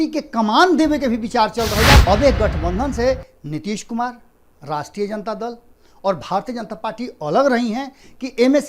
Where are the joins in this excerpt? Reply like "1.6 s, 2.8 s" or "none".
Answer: 2.0 s